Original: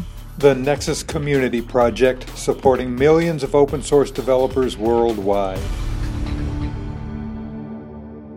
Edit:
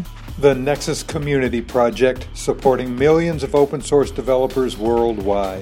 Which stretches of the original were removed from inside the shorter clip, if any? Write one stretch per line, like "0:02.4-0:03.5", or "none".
none